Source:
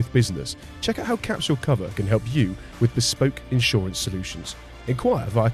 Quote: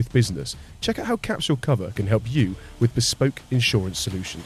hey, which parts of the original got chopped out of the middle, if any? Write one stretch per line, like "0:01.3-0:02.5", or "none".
none